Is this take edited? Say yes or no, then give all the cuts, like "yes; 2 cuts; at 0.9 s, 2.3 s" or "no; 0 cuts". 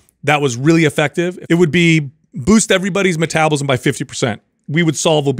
yes; 1 cut; at 1.4 s